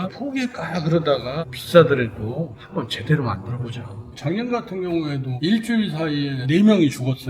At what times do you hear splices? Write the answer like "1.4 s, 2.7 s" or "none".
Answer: 1.6 s, 4.0 s